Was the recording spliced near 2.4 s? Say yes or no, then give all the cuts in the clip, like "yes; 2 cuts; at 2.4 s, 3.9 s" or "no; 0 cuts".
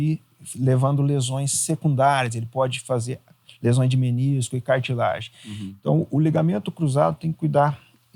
no; 0 cuts